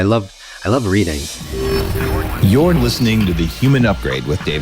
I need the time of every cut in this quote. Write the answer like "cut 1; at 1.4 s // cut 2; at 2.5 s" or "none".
cut 1; at 1.2 s